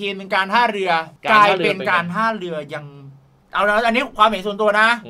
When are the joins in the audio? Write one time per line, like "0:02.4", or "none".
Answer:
none